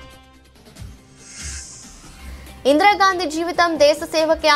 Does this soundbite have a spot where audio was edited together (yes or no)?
yes